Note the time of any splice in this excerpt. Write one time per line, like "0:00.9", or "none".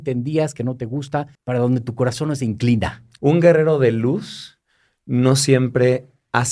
0:01.3
0:03.0